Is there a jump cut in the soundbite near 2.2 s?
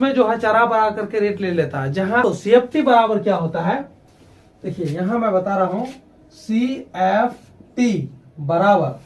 yes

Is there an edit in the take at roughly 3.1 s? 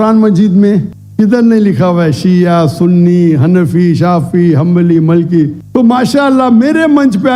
no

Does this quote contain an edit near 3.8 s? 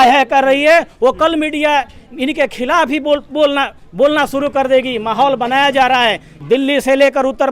no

